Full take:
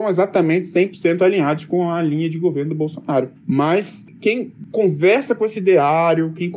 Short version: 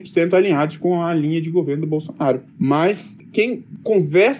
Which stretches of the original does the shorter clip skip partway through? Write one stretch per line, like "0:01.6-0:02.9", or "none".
none